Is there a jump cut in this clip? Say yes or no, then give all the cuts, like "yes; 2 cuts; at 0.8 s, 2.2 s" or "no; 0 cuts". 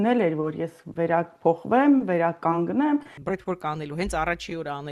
yes; 1 cut; at 3.2 s